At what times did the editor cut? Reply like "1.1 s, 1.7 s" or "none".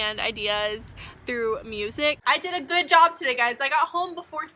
2.2 s